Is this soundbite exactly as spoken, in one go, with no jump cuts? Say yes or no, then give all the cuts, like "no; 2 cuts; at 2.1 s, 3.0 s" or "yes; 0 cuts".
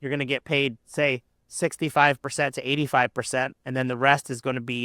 yes; 0 cuts